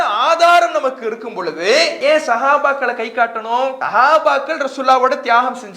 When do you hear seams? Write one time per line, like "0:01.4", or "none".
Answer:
0:01.9
0:03.8